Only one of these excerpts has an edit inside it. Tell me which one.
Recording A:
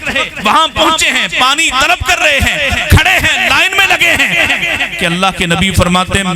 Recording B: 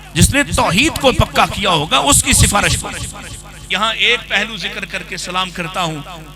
B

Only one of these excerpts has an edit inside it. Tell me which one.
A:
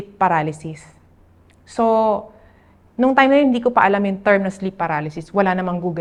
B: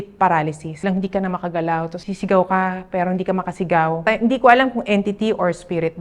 B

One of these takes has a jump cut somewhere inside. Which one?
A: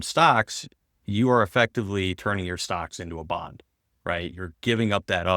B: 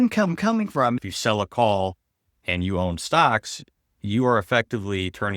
B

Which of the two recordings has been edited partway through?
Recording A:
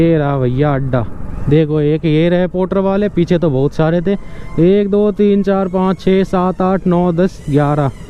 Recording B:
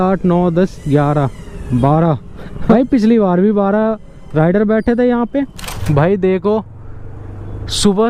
B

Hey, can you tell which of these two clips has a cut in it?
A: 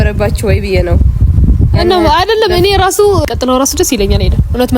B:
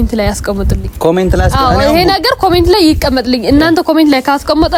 A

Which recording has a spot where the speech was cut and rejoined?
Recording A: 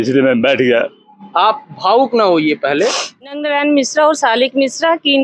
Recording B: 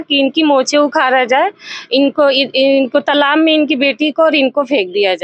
A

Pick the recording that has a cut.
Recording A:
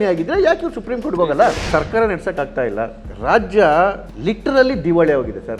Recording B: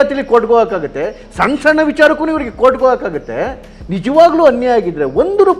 A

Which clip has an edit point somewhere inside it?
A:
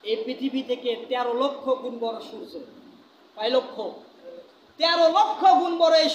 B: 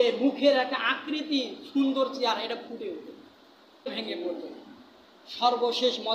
B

